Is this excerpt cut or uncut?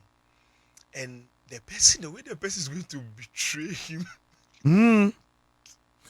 uncut